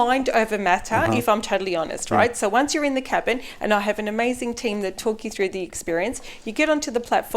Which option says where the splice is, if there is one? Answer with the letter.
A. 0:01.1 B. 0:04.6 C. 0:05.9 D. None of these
D